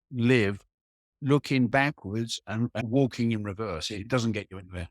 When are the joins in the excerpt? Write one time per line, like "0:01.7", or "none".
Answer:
0:02.8

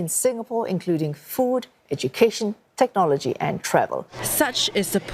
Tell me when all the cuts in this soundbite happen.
0:04.2

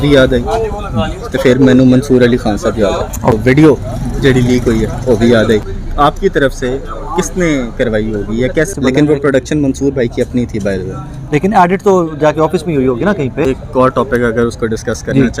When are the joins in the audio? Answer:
0:03.2
0:05.6
0:08.7
0:13.4

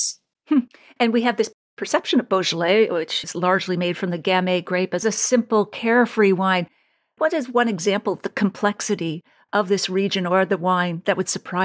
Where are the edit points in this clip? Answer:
0:05.0
0:07.2

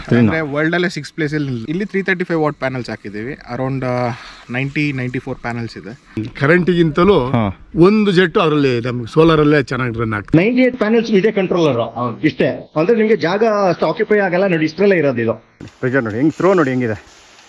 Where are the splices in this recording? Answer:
0:01.6
0:06.4
0:10.2
0:15.5

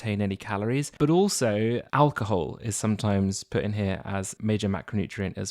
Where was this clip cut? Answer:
0:00.9
0:01.9
0:04.3

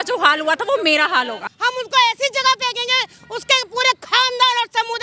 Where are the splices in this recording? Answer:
0:01.6

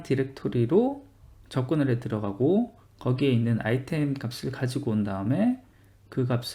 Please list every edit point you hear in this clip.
none

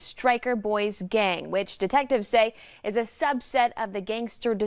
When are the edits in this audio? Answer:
none

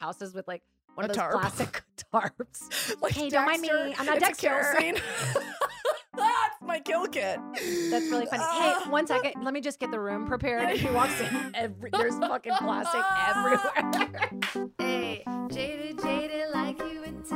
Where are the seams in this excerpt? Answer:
0:14.4

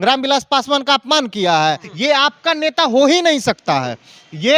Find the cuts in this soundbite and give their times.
0:01.9

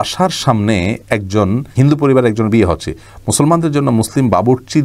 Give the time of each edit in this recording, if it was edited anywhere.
0:01.7

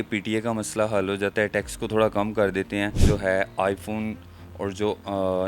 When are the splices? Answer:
0:03.0

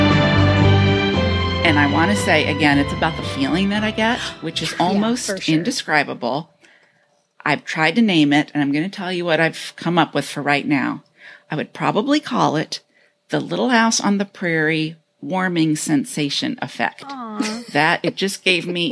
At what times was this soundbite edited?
0:01.6

